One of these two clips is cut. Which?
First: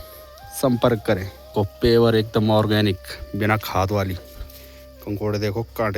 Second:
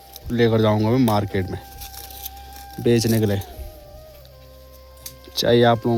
first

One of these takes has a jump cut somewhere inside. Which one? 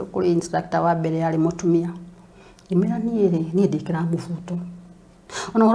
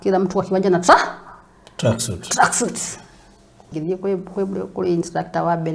second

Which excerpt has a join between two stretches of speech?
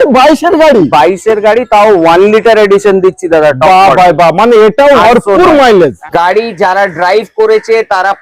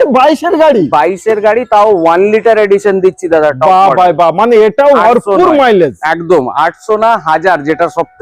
first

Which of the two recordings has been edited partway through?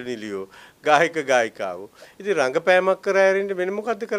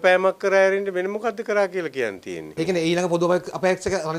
second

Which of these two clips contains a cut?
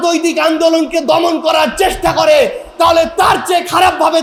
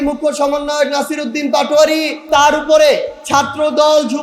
second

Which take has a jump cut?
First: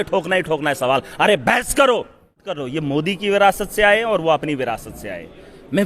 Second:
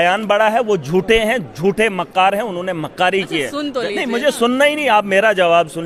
first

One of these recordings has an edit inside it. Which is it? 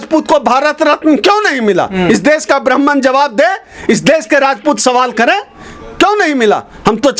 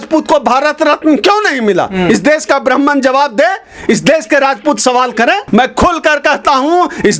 second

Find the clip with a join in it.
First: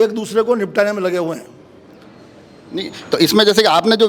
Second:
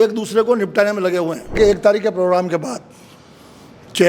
second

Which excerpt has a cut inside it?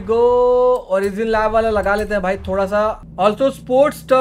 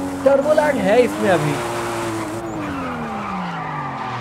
first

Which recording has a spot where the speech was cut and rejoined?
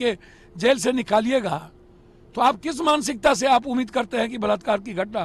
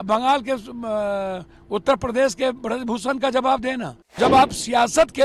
second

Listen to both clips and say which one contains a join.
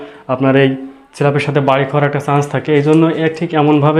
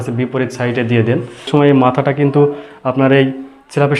second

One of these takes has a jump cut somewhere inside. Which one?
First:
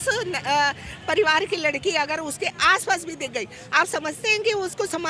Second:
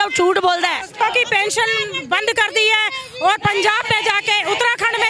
second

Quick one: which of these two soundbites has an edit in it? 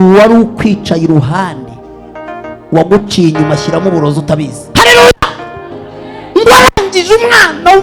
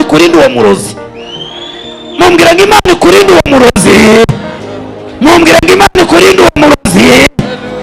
first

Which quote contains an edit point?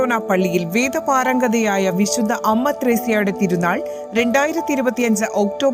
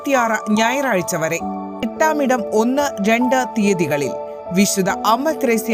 second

